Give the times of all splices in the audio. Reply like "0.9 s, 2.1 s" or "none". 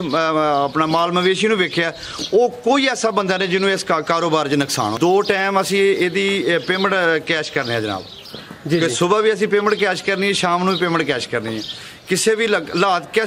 4.9 s